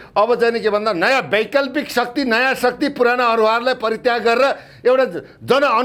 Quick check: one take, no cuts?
yes; 0 cuts

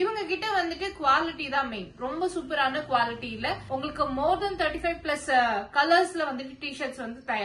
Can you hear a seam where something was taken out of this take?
no; 0 cuts

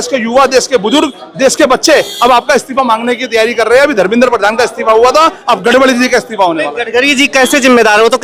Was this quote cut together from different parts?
no; 0 cuts

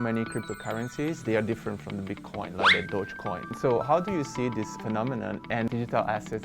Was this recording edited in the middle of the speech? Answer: yes; 2 cuts; at 1.2 s, 5.7 s

